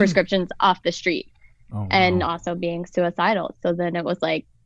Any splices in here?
no; 0 cuts

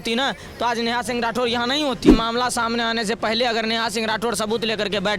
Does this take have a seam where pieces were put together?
yes; 1 cut; at 2.1 s

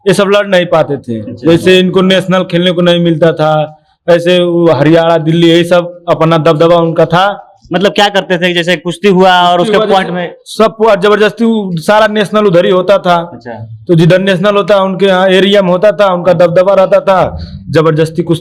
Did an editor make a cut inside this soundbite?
no; 0 cuts

